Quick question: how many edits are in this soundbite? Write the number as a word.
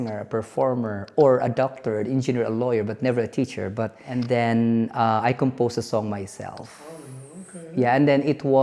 one